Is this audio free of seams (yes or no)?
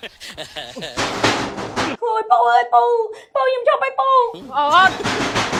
yes